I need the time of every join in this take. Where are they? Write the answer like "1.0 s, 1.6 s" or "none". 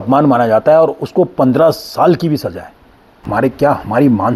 3.3 s